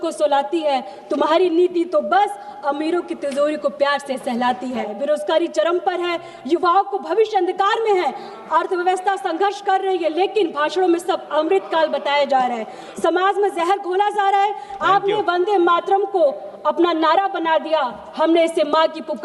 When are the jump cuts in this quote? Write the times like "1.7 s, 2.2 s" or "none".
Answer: 4.9 s, 14.7 s